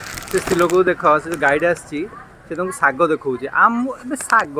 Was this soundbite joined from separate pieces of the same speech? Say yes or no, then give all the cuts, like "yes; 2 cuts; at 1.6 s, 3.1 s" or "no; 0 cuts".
no; 0 cuts